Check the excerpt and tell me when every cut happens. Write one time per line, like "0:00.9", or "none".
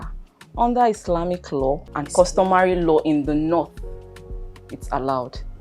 0:01.9